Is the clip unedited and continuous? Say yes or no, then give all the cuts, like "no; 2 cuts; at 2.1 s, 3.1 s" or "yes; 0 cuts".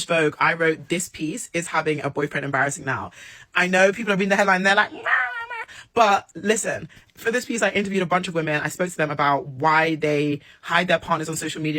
yes; 0 cuts